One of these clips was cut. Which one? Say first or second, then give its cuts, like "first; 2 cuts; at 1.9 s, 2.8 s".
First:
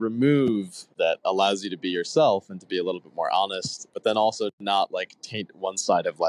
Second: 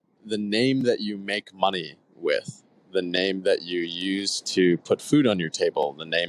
first; 2 cuts; at 0.9 s, 3.9 s